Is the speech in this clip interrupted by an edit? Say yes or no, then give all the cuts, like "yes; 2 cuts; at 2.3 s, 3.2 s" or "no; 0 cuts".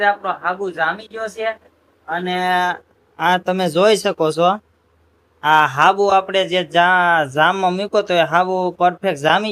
no; 0 cuts